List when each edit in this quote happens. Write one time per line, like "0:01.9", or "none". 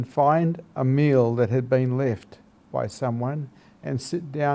none

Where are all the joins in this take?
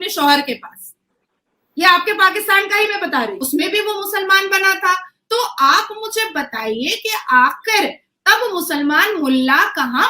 0:03.4

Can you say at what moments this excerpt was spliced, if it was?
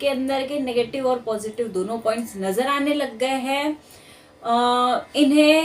none

